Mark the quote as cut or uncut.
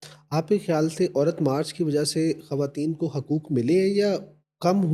uncut